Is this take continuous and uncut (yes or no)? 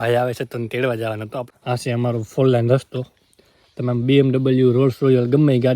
no